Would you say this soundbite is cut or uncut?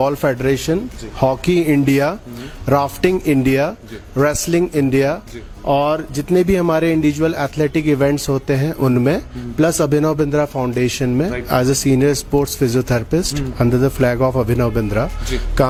uncut